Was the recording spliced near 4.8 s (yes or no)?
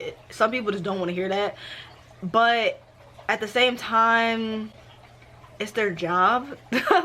no